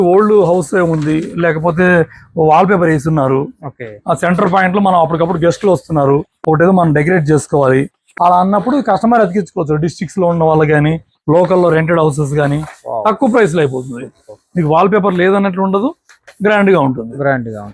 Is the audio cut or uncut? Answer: uncut